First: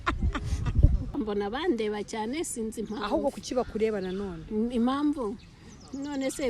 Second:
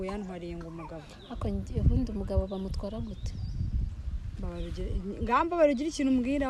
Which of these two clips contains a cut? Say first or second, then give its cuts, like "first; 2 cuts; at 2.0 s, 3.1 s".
first; 1 cut; at 1.1 s